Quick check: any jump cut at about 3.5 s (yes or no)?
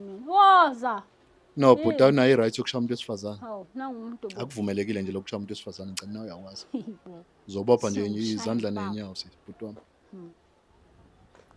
no